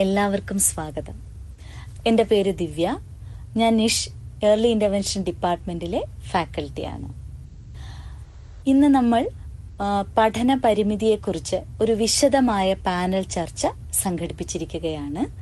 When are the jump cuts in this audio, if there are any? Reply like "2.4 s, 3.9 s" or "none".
none